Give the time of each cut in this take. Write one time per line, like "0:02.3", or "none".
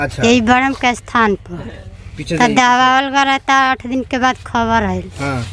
none